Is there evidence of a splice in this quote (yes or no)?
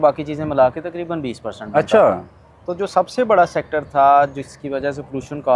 no